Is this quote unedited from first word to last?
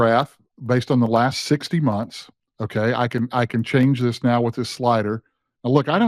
yes; 0 cuts

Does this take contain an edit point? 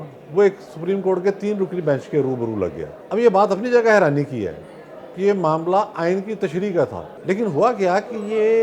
yes; 2 cuts; at 2.9 s, 7.1 s

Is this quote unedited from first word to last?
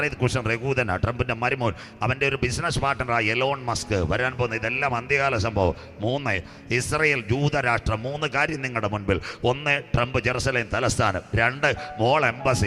yes; 0 cuts

